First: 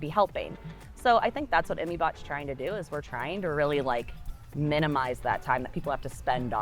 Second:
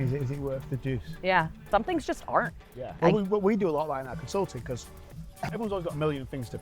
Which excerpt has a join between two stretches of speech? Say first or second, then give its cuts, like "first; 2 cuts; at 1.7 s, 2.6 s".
second; 3 cuts; at 1.7 s, 3.0 s, 5.5 s